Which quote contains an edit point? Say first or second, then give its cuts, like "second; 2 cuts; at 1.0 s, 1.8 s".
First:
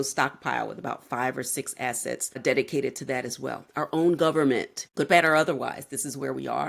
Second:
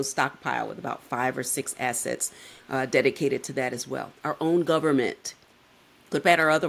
first; 2 cuts; at 2.4 s, 4.8 s